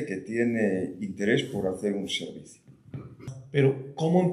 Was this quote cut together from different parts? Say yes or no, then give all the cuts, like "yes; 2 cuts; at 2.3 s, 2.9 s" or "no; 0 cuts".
yes; 1 cut; at 3.3 s